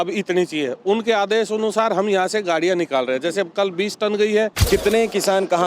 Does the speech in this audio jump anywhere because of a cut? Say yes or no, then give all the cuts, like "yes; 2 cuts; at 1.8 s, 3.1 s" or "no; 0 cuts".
yes; 1 cut; at 4.6 s